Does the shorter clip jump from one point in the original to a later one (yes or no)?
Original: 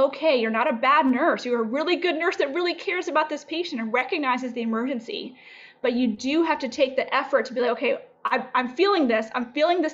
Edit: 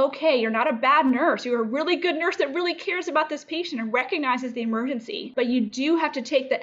yes